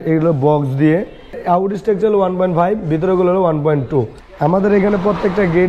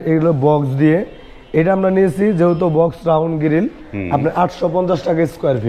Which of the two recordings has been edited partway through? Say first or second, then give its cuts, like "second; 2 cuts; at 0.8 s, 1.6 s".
first; 2 cuts; at 1.3 s, 4.2 s